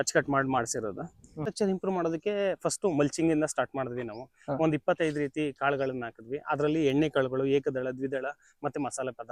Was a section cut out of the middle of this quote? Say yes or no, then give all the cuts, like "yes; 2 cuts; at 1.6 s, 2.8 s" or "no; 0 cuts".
yes; 1 cut; at 1.4 s